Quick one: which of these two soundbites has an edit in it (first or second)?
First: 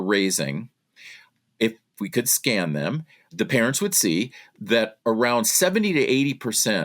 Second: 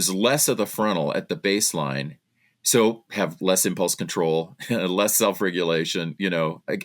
first